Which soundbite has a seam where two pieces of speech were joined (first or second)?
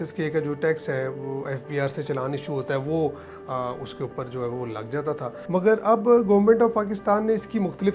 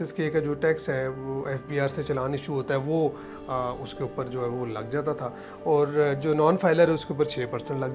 first